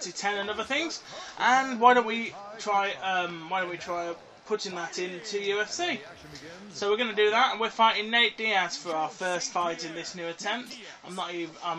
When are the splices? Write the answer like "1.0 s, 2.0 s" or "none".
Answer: none

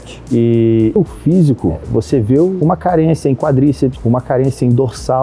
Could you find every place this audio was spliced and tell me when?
1.0 s, 4.0 s

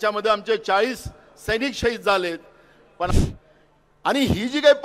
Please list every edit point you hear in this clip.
3.1 s

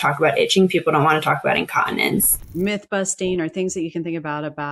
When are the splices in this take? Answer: 2.4 s

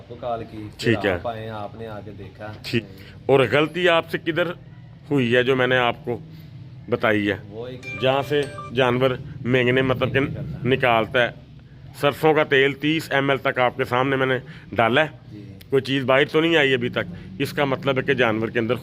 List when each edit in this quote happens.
2.8 s, 7.8 s

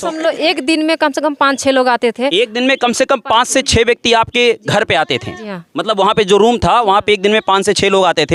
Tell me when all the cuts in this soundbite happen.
none

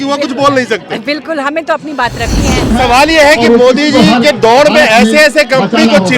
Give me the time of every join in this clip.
2.7 s

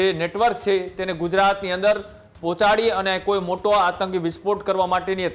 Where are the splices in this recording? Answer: none

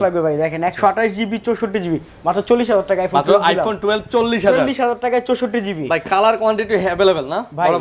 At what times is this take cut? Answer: none

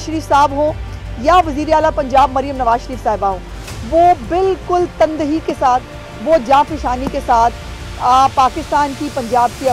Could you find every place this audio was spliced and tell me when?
none

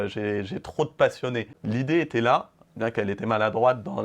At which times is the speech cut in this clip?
1.6 s

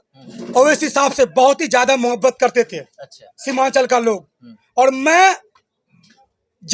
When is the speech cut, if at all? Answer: none

